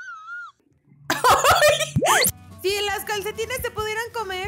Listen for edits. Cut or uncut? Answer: cut